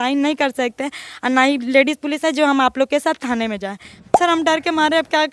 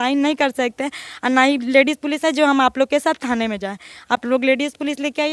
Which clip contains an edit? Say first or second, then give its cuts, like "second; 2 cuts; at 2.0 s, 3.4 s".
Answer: first; 1 cut; at 4.0 s